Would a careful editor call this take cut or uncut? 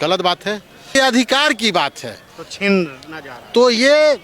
cut